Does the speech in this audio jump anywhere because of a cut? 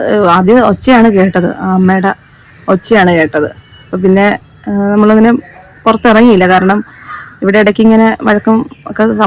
no; 0 cuts

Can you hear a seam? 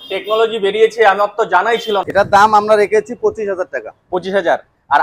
yes; 1 cut; at 2.1 s

